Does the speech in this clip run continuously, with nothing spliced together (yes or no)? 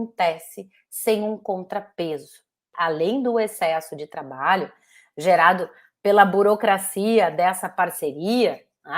no